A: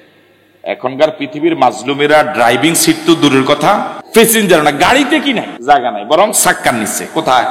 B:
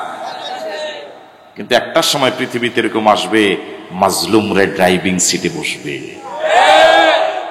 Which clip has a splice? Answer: A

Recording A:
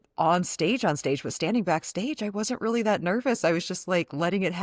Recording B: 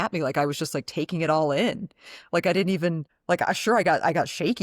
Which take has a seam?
B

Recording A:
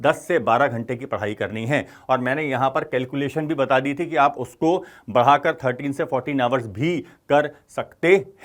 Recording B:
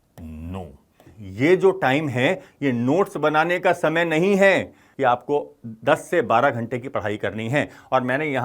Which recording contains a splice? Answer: B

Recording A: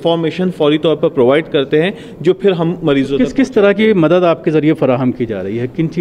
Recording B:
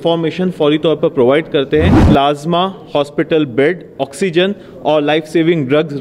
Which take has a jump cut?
B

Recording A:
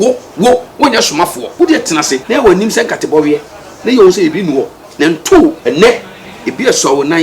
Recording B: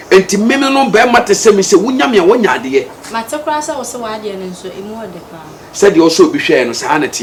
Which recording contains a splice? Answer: A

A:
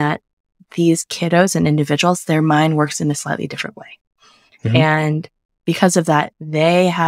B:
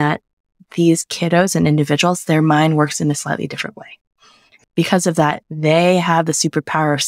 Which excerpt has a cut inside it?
B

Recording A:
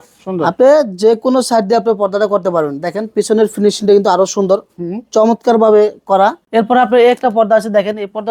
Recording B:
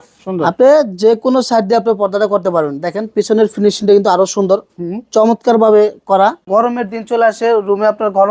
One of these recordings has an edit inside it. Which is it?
B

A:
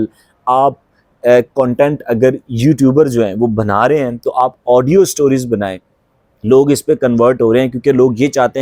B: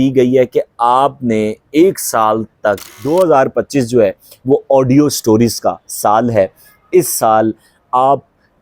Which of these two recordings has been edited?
B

